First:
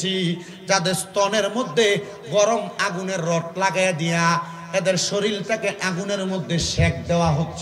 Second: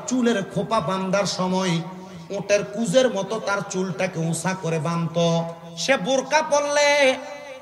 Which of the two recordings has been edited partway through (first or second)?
second